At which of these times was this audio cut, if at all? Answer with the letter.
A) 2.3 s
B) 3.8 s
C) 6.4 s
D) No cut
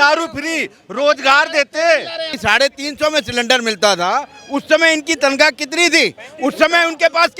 A